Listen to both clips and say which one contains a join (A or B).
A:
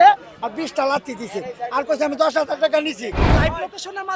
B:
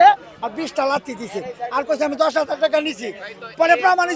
A